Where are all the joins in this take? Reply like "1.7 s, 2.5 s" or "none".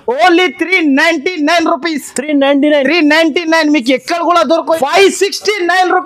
4.7 s